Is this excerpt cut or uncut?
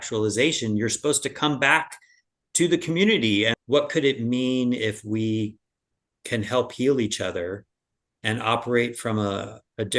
cut